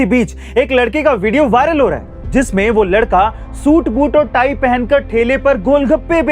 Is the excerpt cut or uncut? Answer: uncut